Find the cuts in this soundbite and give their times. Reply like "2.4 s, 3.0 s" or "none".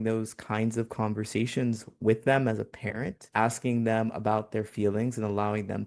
none